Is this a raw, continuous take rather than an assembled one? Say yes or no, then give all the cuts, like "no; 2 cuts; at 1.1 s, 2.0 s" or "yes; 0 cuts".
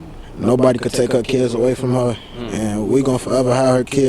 no; 1 cut; at 2.3 s